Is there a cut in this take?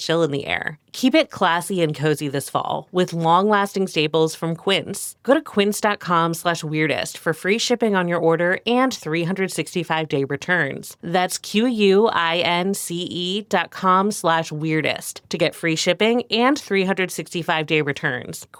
no; 0 cuts

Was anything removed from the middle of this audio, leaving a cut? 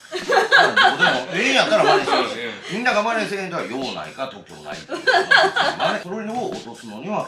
yes; 1 cut; at 6.0 s

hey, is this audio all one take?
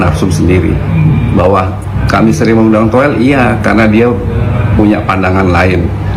yes; 0 cuts

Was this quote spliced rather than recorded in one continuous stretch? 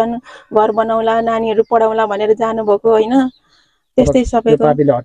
no; 0 cuts

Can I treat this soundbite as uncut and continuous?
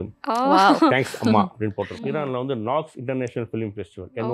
no; 1 cut; at 1.9 s

